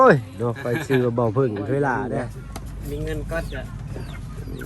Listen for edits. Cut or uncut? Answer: cut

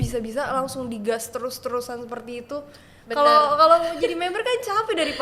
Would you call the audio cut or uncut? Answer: uncut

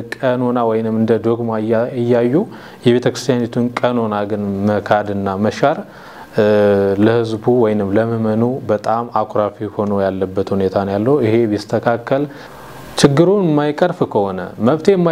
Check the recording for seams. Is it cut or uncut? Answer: cut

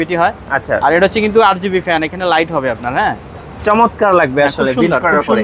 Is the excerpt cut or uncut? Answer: uncut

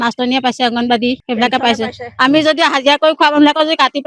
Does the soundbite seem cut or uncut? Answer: cut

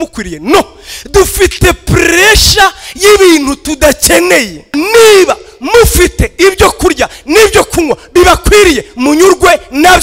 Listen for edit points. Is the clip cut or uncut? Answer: cut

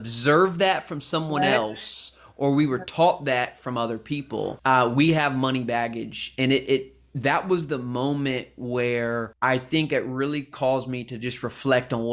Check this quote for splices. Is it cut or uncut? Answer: cut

